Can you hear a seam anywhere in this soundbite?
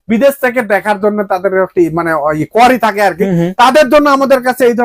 no; 0 cuts

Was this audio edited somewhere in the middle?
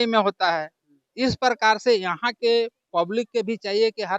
no; 0 cuts

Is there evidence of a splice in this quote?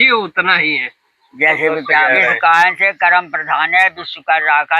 yes; 1 cut; at 2.1 s

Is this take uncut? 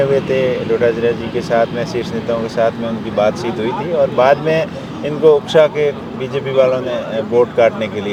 yes; 0 cuts

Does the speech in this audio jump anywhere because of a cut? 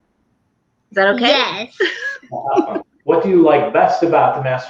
yes; 1 cut; at 2.9 s

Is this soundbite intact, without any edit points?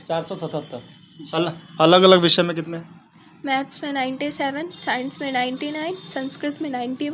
yes; 0 cuts

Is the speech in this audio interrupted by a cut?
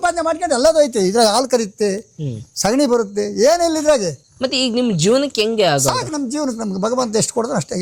no; 0 cuts

